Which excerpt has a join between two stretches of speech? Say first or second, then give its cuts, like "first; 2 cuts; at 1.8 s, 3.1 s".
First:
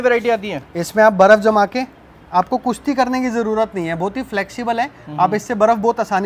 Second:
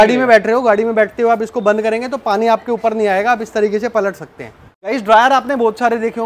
second; 1 cut; at 4.7 s